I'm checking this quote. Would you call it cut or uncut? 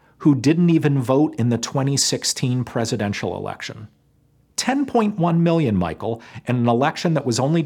uncut